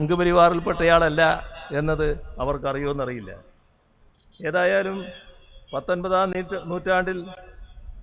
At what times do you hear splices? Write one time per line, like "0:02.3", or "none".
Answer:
none